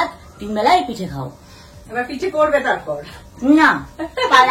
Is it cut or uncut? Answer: uncut